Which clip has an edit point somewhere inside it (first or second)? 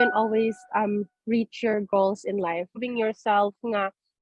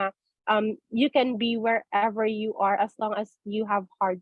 first